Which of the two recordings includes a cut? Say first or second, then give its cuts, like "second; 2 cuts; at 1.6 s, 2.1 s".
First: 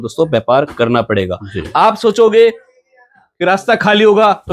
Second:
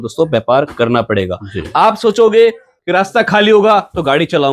second; 1 cut; at 2.7 s